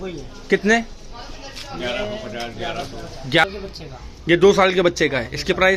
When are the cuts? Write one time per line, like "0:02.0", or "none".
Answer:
0:03.4